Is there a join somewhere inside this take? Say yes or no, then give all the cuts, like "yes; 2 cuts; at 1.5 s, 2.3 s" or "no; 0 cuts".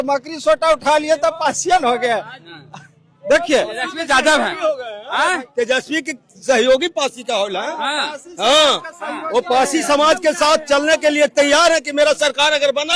no; 0 cuts